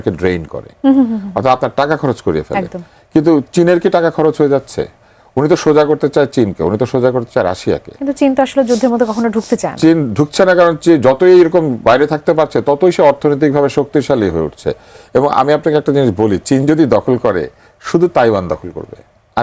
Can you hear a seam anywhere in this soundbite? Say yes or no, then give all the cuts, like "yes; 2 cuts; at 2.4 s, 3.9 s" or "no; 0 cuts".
no; 0 cuts